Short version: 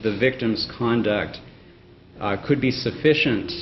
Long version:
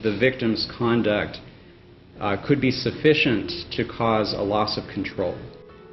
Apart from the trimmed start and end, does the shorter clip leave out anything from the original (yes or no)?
no